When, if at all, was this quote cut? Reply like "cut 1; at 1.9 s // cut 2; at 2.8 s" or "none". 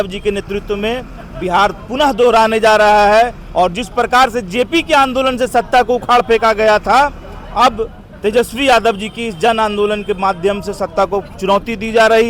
none